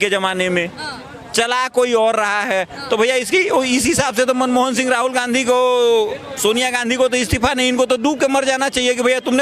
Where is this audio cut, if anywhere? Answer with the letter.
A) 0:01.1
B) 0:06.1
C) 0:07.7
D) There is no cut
D